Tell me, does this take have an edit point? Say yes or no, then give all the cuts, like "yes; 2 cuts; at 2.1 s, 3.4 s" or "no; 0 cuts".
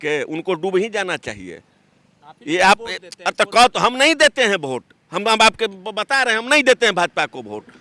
no; 0 cuts